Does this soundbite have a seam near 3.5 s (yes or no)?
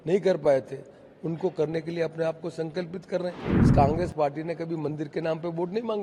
yes